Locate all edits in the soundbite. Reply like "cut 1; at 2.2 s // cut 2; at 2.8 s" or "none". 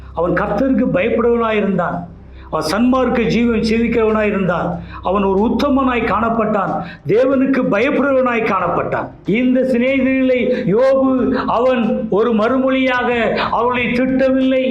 cut 1; at 9.2 s